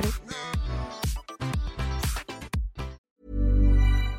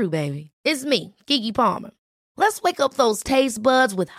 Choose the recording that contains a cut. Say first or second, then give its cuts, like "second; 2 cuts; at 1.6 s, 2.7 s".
first; 1 cut; at 3.0 s